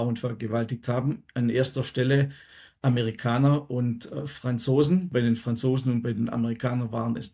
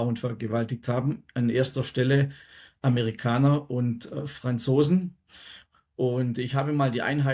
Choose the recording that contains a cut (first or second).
first